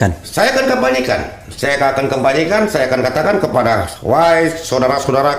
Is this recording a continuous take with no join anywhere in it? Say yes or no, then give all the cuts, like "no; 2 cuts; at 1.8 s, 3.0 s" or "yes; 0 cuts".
no; 1 cut; at 3.9 s